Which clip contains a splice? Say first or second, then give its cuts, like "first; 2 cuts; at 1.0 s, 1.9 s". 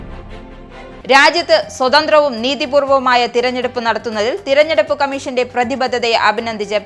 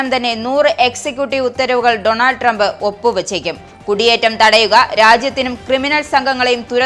first; 1 cut; at 1.0 s